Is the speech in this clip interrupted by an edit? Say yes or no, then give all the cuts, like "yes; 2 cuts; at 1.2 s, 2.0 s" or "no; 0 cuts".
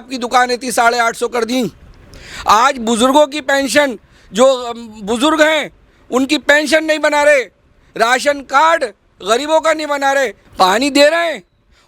yes; 1 cut; at 10.4 s